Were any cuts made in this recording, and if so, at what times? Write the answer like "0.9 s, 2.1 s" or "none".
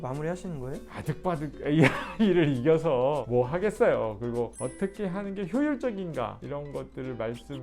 0.9 s, 4.5 s, 6.4 s